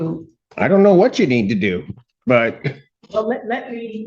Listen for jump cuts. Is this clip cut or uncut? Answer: cut